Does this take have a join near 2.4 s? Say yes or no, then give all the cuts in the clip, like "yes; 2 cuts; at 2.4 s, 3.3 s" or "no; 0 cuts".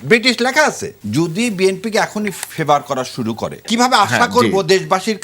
no; 2 cuts; at 0.9 s, 3.6 s